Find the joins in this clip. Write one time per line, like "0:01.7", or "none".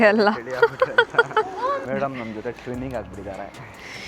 0:01.9